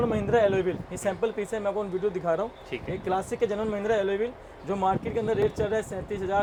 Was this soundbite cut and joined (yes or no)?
no